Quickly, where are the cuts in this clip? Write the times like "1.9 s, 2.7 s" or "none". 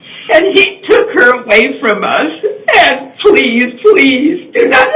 none